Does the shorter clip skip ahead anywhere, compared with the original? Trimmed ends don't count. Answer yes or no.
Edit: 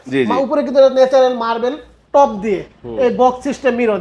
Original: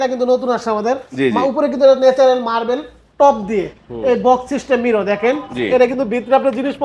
no